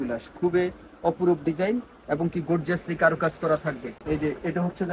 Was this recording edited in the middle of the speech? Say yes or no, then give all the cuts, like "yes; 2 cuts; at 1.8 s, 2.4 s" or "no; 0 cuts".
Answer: yes; 1 cut; at 3.9 s